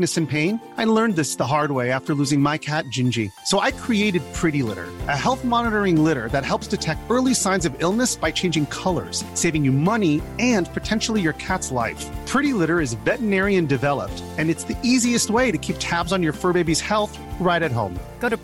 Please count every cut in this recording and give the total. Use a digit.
0